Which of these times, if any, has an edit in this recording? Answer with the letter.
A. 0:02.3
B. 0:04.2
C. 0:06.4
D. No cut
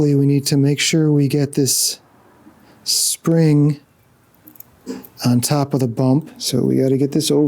C